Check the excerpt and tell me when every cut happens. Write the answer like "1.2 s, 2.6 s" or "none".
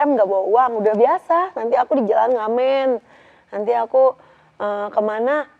none